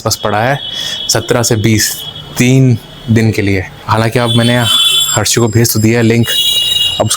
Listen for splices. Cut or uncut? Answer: uncut